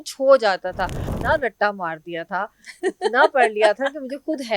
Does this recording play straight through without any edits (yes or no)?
no